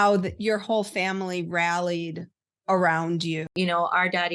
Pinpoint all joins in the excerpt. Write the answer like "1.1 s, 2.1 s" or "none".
3.5 s